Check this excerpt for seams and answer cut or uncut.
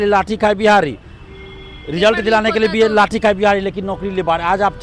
uncut